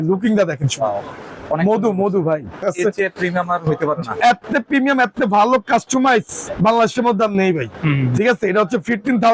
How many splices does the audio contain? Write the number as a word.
one